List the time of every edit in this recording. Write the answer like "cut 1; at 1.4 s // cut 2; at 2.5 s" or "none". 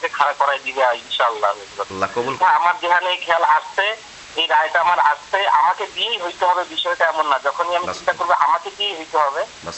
cut 1; at 2.4 s